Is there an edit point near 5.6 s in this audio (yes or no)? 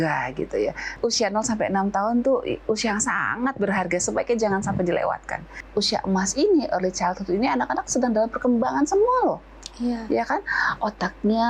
yes